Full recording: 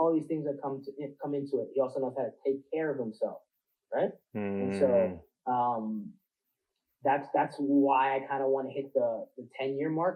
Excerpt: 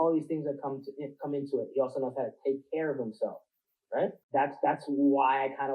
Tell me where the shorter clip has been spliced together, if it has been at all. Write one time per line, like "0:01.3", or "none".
0:04.2